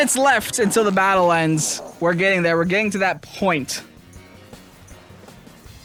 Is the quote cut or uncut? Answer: uncut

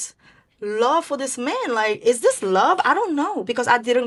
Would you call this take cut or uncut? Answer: uncut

